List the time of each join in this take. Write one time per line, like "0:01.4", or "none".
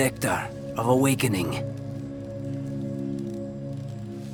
none